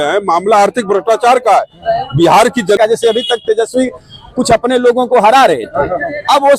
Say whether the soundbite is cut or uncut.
cut